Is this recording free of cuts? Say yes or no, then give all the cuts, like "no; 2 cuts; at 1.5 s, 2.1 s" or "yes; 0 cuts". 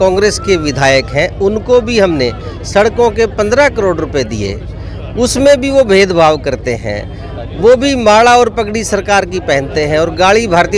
yes; 0 cuts